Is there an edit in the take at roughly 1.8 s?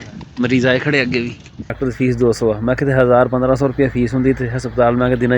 yes; 1 cut; at 1.8 s

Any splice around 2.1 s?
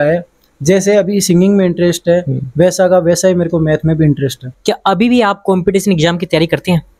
no; 1 cut; at 4.5 s

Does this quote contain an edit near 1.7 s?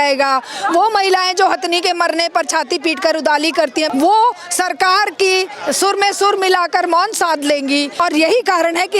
no; 3 cuts; at 3.9 s, 5.6 s, 7.9 s

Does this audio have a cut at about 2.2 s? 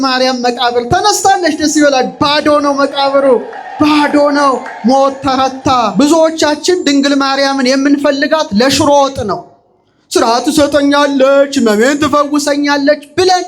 no; 1 cut; at 5.9 s

